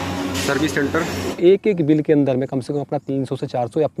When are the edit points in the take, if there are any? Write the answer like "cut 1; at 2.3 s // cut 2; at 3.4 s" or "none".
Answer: cut 1; at 1.3 s